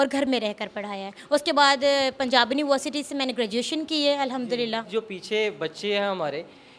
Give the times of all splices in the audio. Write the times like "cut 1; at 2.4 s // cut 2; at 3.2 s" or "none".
cut 1; at 4.9 s